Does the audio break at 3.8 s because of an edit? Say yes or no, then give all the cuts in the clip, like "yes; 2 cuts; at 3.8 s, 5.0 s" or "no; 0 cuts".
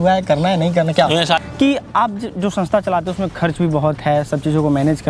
no; 1 cut; at 1.4 s